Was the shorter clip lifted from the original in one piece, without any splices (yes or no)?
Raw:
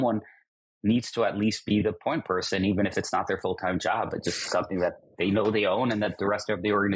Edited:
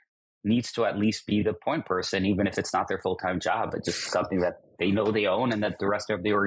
yes